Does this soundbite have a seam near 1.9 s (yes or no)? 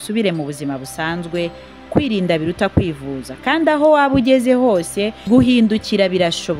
yes